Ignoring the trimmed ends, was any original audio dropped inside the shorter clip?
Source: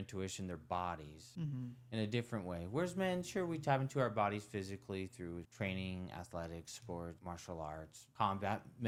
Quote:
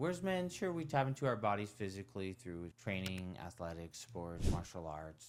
no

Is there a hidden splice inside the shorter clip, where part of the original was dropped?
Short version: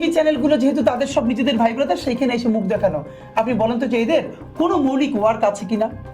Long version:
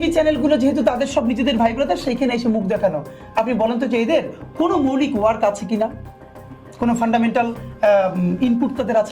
no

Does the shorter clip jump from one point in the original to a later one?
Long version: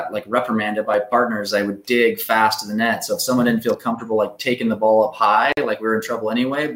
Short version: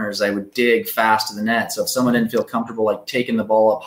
no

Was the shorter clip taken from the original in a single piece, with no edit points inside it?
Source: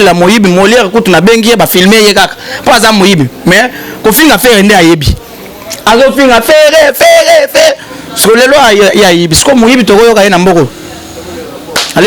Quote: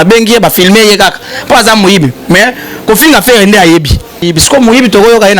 no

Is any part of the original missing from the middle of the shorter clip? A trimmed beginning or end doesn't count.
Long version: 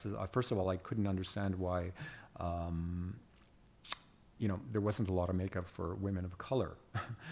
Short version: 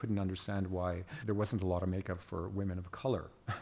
yes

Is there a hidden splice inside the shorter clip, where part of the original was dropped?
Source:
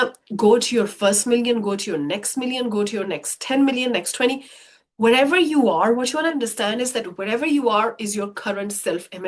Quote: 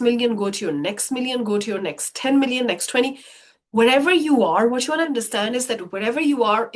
no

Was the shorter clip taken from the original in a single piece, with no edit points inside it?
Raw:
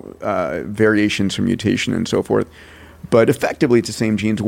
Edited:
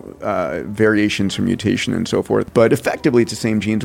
no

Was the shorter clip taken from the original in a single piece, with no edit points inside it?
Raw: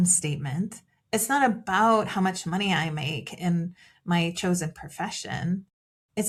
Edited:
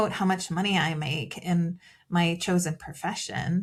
yes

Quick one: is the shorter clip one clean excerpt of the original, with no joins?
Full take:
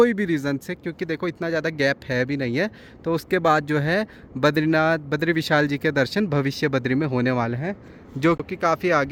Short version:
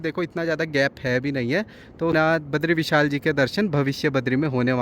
no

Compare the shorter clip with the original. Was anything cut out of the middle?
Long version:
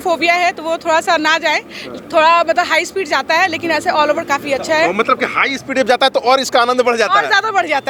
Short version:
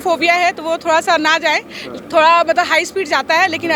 no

